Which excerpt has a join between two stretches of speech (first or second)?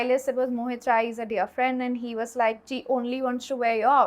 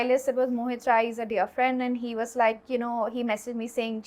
first